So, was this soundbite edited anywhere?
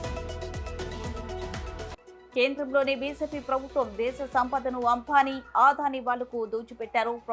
no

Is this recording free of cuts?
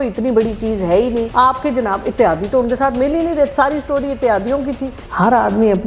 no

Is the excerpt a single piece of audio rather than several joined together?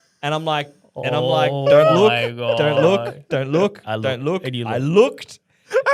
yes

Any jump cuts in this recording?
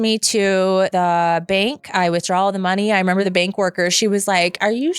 yes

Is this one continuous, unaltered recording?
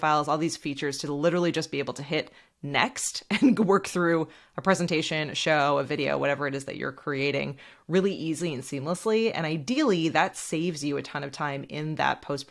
yes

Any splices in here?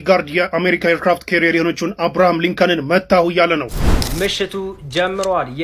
yes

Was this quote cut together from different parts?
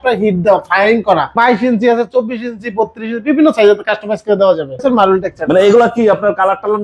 yes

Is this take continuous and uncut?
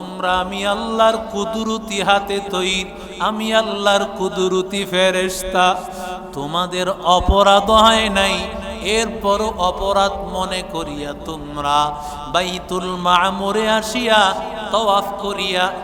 yes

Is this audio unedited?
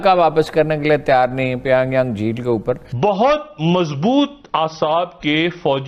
no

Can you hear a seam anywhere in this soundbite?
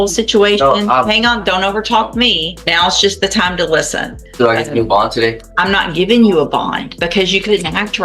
yes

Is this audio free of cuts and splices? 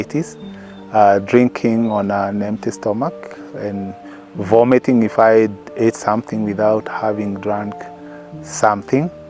yes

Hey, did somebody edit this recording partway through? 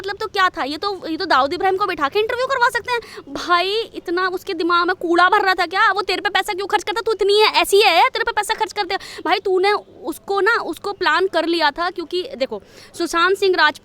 yes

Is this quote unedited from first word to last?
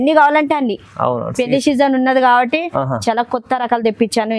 yes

